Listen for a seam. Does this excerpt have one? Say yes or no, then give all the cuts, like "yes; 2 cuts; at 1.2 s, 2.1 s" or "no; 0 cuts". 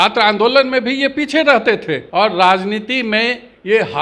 yes; 1 cut; at 2.0 s